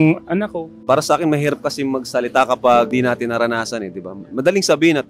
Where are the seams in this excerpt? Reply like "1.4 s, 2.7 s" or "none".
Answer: 0.8 s, 2.9 s